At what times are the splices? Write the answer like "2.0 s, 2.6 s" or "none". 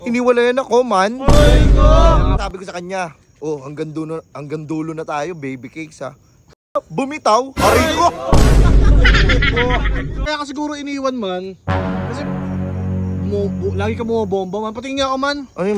2.4 s, 10.2 s